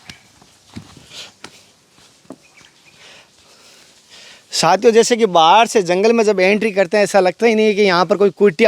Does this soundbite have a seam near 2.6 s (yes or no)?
yes